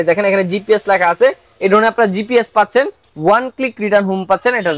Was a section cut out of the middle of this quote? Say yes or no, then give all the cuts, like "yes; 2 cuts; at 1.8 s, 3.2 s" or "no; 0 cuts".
no; 0 cuts